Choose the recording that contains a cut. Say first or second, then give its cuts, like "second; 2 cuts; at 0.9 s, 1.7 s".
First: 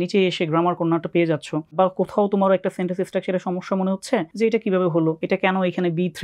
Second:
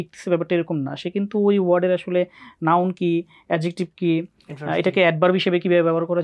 first; 3 cuts; at 1.7 s, 4.3 s, 5.2 s